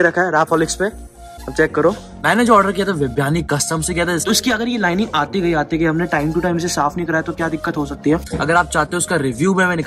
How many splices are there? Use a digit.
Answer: 3